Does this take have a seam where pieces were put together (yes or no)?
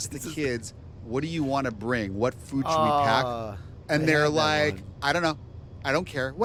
no